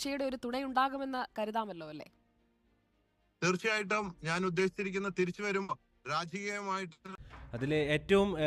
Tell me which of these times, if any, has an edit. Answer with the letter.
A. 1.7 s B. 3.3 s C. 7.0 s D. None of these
C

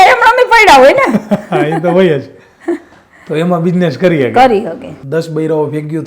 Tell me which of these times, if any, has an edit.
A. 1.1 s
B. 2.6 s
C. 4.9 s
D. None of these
C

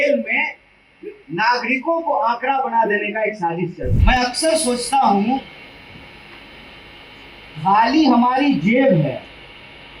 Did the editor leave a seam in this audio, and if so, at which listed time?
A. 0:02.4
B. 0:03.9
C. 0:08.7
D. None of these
B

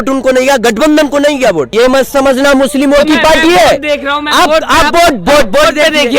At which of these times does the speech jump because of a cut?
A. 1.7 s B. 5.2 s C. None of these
A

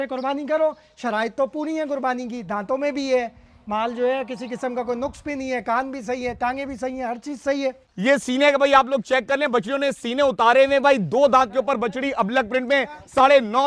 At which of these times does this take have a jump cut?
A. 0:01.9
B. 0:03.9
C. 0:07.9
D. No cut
C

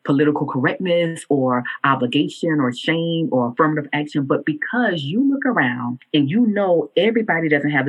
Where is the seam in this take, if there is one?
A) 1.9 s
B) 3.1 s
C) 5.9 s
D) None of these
C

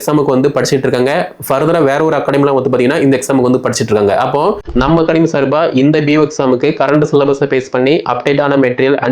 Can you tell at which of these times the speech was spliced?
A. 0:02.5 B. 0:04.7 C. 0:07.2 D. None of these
B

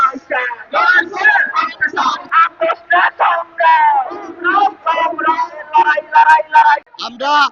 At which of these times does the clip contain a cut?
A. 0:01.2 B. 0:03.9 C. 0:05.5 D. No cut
D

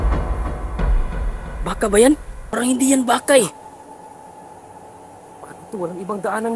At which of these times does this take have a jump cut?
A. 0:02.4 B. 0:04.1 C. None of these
A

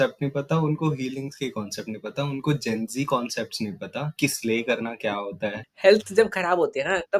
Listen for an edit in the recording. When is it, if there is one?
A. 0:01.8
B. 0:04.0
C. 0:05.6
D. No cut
C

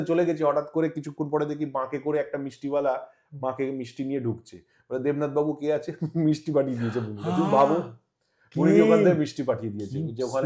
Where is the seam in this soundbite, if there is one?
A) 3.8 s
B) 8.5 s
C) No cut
C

